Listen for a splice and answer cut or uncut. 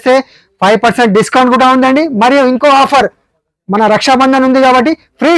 uncut